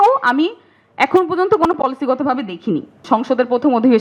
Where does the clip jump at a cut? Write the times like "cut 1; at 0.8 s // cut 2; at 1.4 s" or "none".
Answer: cut 1; at 3.0 s